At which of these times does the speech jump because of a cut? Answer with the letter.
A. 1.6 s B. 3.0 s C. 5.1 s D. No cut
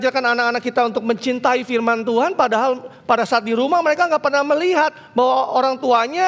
D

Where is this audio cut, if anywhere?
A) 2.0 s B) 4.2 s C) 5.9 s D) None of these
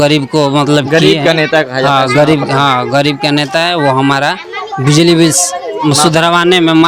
D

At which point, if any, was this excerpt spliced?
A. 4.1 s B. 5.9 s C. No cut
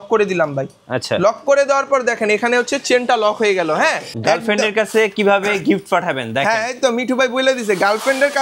A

